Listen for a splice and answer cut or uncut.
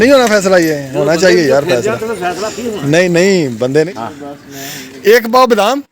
cut